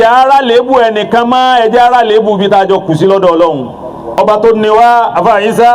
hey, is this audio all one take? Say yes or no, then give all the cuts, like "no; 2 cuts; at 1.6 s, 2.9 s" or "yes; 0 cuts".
no; 1 cut; at 4.0 s